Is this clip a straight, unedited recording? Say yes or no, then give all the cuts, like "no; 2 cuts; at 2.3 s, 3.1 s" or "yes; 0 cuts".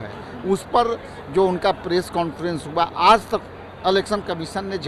yes; 0 cuts